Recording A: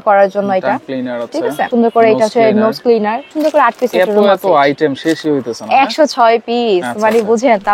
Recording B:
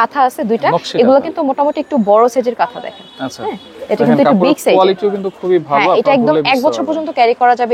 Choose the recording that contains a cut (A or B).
A